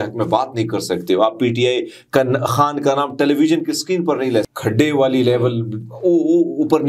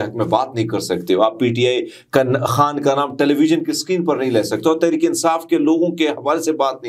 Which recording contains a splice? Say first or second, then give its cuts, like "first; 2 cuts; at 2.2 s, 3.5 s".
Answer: first; 1 cut; at 4.5 s